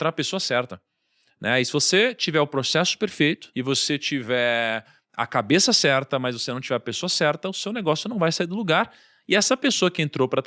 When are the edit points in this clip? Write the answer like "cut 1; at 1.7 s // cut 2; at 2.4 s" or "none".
cut 1; at 3.5 s